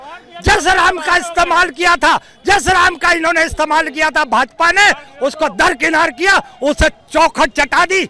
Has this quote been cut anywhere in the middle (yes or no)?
no